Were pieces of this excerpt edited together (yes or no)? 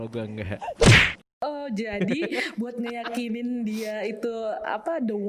yes